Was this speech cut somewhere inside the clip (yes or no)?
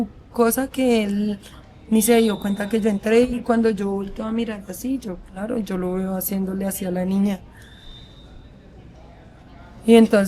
no